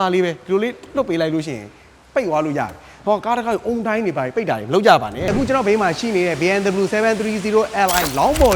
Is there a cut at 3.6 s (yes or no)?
no